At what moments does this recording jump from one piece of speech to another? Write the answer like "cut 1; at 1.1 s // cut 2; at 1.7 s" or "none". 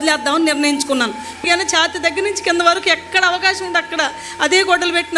cut 1; at 1.4 s